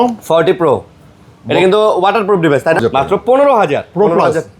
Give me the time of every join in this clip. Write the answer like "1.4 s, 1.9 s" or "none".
2.8 s